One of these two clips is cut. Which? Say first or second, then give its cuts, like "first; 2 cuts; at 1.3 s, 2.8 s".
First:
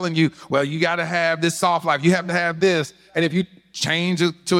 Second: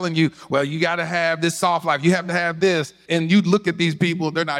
second; 1 cut; at 3.0 s